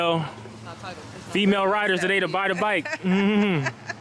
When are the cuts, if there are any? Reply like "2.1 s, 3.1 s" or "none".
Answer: none